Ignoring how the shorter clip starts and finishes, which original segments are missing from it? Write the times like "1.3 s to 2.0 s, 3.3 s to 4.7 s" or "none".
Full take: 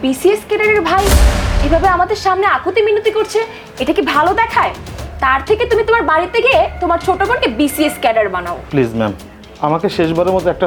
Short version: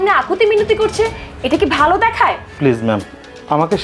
4.8 s to 8.6 s